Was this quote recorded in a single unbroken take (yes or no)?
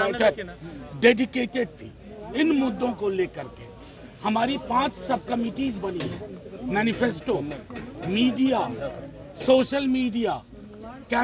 yes